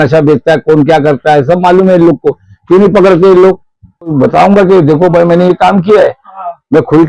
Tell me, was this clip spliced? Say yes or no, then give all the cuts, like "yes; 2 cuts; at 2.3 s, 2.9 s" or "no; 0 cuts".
yes; 1 cut; at 4.1 s